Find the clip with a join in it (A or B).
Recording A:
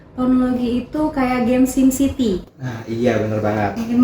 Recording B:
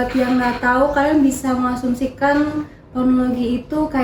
A